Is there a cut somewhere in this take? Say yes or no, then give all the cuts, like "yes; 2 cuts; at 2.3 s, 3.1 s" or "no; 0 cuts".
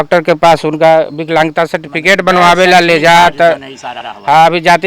no; 0 cuts